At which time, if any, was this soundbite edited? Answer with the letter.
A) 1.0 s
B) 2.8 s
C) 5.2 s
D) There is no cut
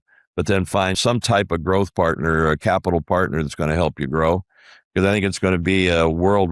A